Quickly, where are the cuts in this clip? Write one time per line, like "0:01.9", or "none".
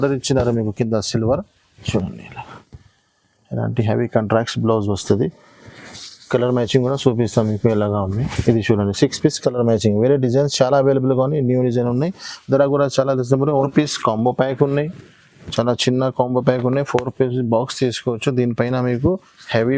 0:01.9
0:13.7